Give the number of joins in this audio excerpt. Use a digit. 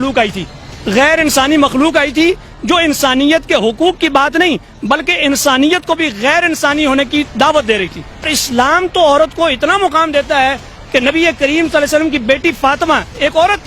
1